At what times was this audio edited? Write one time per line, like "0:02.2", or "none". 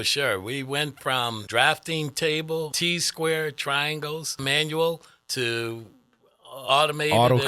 0:01.4
0:02.7
0:04.4